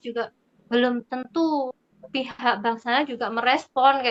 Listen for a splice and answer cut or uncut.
uncut